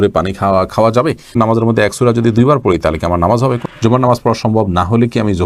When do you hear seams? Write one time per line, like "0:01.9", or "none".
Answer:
0:01.3
0:03.6